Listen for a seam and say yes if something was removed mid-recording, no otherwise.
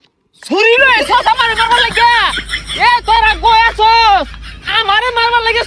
no